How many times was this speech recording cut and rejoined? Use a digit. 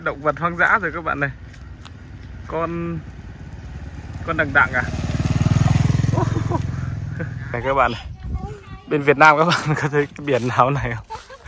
1